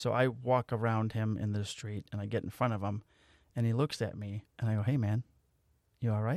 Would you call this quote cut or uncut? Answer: cut